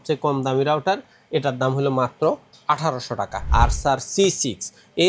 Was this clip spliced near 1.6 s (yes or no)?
no